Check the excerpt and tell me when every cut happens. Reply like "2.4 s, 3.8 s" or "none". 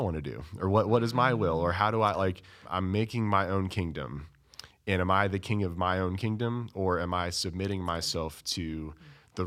2.7 s